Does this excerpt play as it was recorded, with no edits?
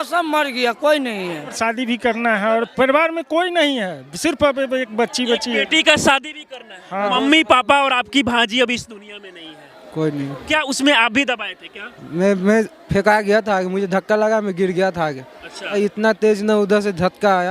no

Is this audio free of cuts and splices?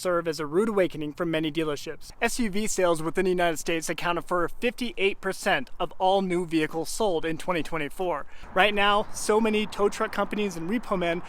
no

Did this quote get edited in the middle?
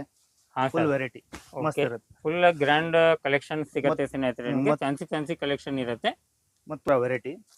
no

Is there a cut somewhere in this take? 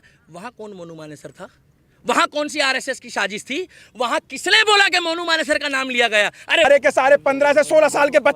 yes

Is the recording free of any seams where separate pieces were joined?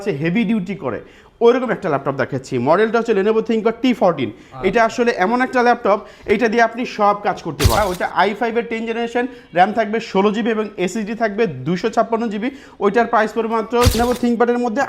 no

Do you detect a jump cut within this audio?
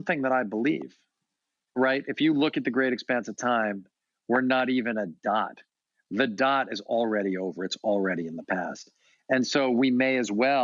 no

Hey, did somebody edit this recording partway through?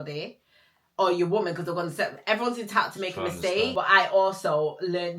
yes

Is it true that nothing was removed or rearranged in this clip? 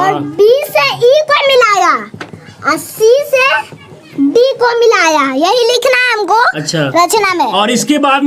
yes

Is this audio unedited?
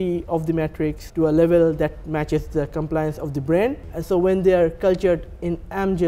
no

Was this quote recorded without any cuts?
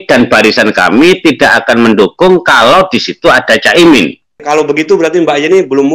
no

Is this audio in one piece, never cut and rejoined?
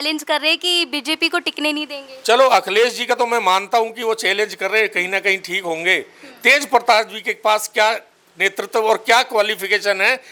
yes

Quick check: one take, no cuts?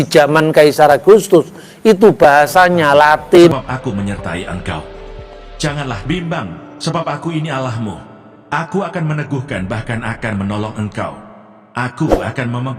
no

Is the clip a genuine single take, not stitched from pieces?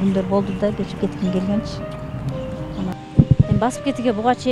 no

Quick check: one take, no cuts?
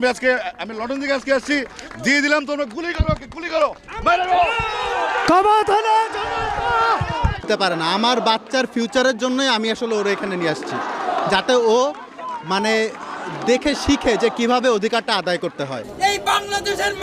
no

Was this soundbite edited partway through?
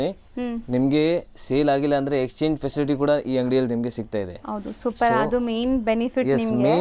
no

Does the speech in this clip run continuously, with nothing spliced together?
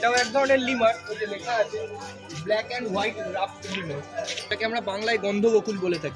no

